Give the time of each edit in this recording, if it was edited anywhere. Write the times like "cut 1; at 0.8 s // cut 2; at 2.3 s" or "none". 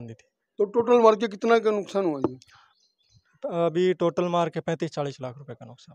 none